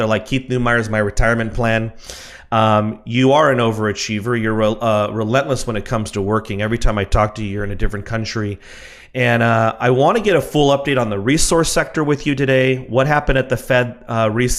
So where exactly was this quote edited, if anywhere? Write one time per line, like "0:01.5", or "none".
none